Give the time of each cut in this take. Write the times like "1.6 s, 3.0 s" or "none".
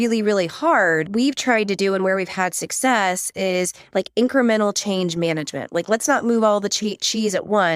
1.1 s